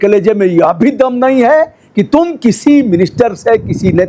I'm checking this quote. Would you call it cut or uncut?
uncut